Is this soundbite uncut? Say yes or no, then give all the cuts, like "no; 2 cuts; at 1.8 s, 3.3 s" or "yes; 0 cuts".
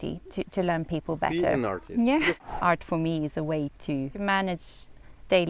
no; 2 cuts; at 2.4 s, 4.1 s